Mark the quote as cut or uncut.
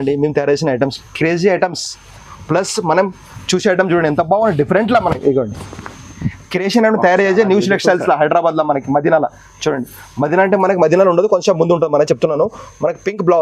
uncut